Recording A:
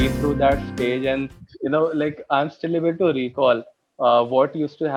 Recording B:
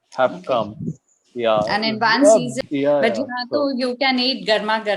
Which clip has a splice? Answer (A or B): B